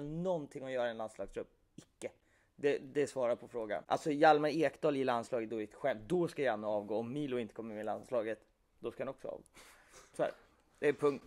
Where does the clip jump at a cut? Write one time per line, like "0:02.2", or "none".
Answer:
none